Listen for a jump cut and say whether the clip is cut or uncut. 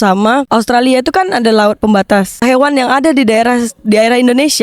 cut